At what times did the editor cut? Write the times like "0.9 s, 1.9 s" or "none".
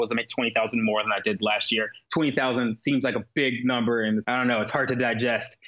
2.0 s, 4.2 s